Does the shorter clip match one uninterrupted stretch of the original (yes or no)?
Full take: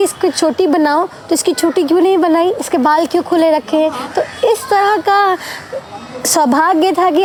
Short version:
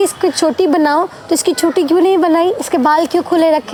yes